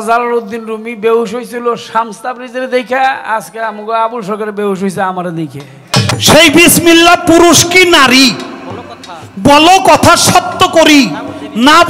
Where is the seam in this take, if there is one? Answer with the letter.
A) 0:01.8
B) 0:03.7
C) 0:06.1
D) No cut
C